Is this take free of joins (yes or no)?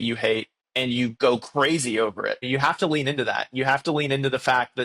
no